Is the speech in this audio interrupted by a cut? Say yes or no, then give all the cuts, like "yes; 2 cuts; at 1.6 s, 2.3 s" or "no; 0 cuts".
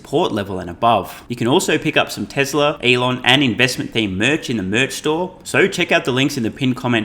yes; 3 cuts; at 1.2 s, 2.8 s, 5.4 s